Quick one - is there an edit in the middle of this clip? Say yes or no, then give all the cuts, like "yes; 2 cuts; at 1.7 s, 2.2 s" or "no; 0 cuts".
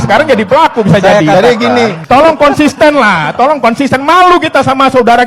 yes; 1 cut; at 2.0 s